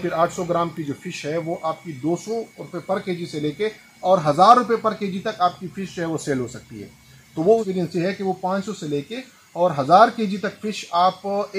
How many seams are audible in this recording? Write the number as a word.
one